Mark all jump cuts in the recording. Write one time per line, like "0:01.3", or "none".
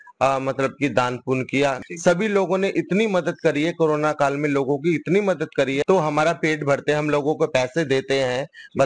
0:01.8
0:05.8